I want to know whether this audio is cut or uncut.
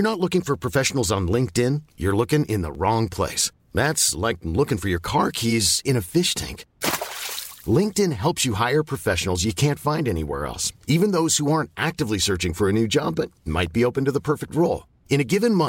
uncut